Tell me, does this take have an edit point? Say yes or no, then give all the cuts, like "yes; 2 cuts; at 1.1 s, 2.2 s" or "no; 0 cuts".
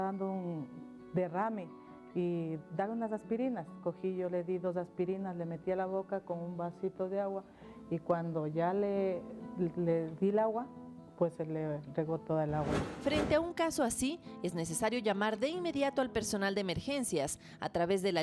yes; 1 cut; at 12.8 s